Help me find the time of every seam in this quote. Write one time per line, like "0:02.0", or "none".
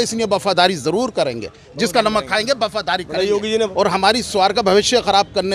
0:03.7